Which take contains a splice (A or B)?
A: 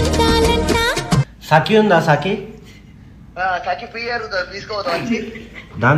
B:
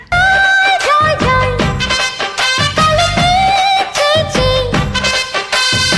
A